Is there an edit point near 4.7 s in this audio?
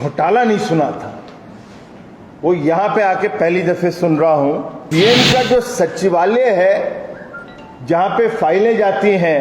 yes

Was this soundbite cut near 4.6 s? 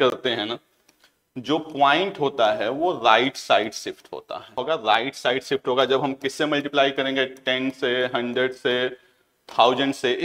yes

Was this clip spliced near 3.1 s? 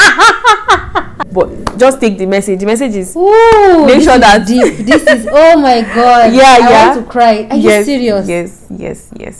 no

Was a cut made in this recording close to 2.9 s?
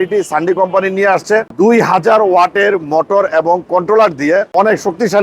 no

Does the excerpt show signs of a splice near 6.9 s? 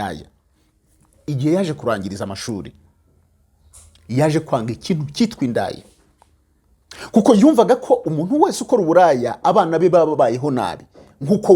no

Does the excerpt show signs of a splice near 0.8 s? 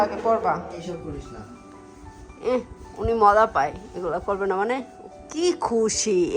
yes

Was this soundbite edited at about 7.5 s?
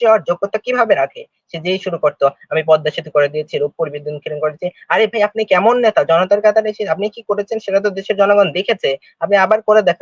no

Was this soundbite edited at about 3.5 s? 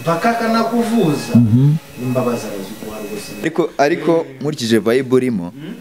yes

